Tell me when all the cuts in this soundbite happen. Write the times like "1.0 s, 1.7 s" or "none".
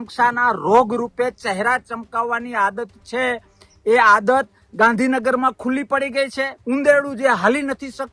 6.6 s